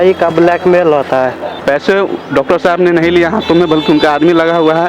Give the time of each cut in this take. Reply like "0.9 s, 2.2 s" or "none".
1.5 s